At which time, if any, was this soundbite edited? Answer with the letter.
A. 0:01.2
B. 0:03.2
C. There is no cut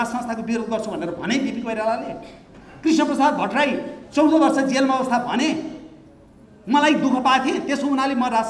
C